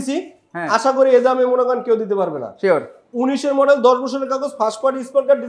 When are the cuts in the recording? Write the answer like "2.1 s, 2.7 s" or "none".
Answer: none

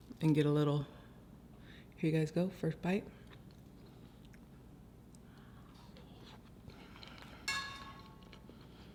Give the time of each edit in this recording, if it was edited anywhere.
none

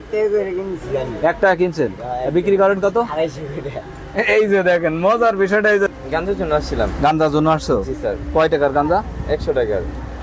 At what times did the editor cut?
5.9 s

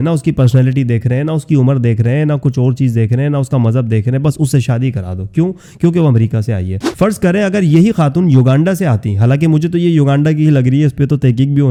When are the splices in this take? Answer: none

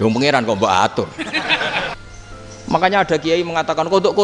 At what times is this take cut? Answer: 2.0 s

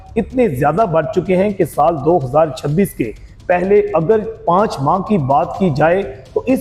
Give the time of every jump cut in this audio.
none

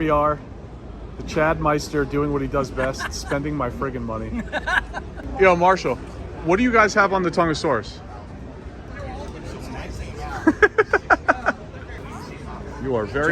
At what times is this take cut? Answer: 5.2 s, 8.8 s, 12.0 s

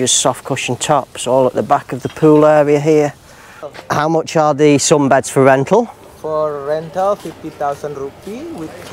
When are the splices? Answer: 3.8 s

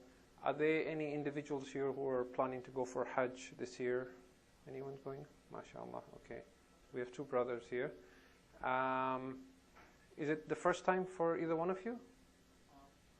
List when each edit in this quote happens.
3.8 s

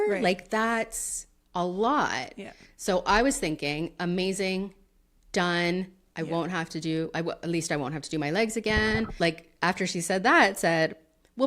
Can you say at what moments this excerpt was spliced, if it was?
9.1 s

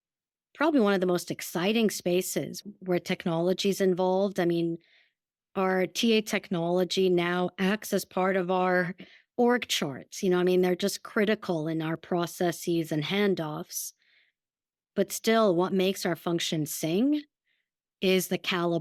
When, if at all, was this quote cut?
none

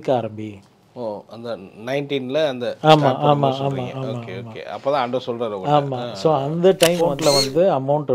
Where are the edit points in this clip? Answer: 7.1 s

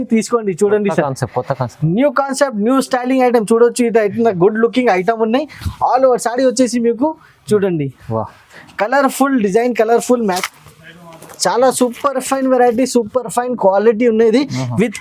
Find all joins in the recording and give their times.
10.2 s

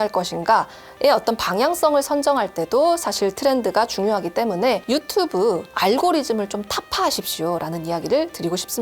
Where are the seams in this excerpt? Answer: 4.8 s

